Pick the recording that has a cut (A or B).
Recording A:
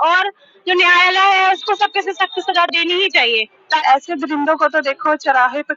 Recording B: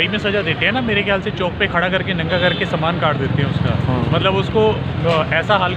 A